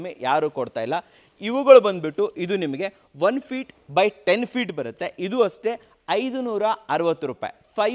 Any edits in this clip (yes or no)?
no